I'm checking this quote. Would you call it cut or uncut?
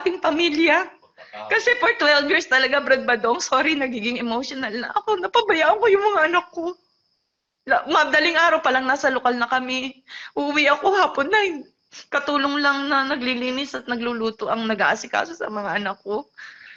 uncut